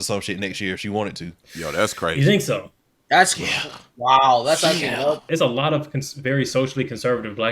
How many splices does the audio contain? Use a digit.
1